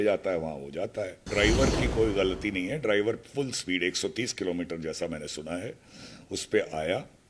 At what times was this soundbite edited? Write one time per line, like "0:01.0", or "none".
0:01.2